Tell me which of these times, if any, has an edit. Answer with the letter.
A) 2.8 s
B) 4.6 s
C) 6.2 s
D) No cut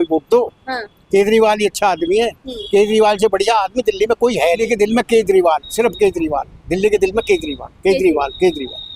B